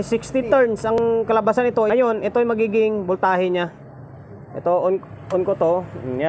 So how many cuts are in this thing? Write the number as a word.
two